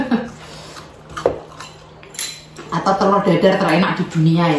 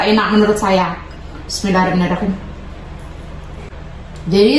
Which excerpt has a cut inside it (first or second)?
second